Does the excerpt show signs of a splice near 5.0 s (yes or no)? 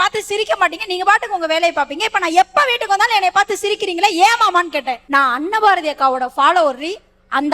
yes